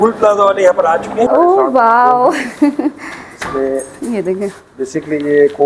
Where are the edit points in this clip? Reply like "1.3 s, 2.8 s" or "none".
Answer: 1.3 s